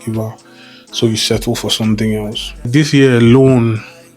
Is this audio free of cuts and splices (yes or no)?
no